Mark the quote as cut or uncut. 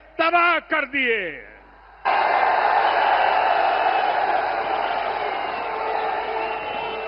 uncut